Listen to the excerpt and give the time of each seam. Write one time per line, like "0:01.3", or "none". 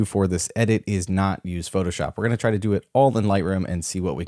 none

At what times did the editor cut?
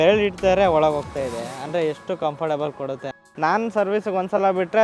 0:03.3

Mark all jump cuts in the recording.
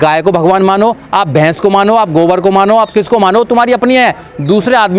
none

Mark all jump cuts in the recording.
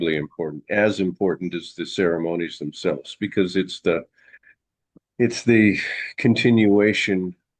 none

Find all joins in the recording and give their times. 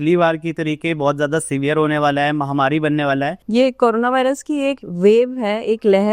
0:03.4

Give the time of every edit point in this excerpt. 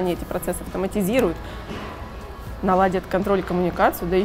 none

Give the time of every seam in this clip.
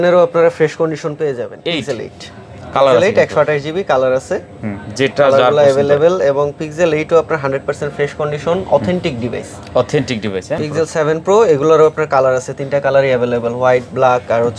0:01.6
0:10.6

